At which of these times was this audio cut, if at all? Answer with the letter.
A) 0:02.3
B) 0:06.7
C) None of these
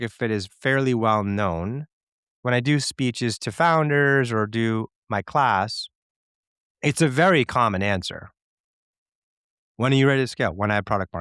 A